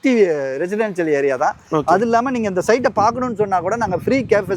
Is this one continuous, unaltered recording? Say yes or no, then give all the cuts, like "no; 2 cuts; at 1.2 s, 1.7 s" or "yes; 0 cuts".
yes; 0 cuts